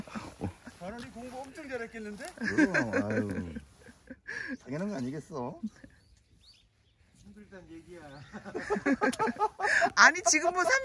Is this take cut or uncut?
uncut